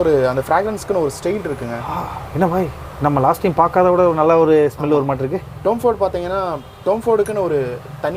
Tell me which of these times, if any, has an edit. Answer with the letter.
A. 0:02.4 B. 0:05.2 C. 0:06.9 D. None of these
D